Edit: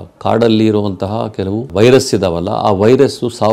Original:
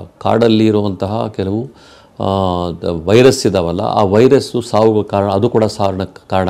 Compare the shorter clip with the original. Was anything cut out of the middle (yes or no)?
yes